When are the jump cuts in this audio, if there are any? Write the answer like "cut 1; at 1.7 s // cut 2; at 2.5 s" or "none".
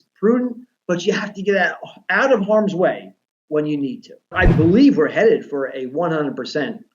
cut 1; at 4.4 s